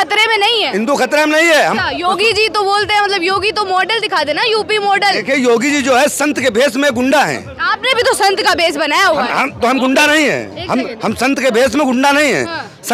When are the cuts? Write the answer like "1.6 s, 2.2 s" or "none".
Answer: 1.8 s